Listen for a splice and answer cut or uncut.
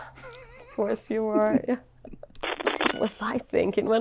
cut